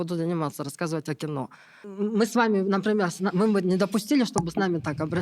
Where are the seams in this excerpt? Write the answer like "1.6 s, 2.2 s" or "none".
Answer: 1.8 s